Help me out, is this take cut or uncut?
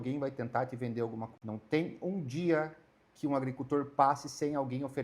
cut